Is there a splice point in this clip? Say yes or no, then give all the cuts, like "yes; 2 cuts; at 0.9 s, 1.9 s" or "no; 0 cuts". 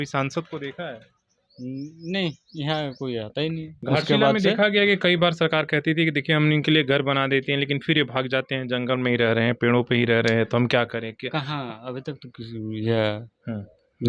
yes; 1 cut; at 3.7 s